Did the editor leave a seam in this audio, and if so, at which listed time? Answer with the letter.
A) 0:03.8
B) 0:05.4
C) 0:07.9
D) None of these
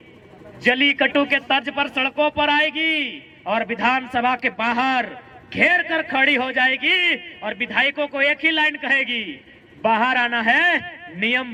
D